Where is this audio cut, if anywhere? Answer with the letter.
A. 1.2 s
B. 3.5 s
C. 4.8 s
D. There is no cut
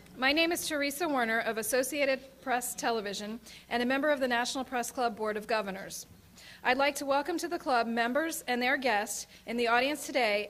D